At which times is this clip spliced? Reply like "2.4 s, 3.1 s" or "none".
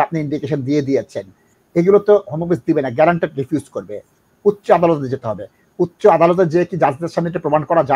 none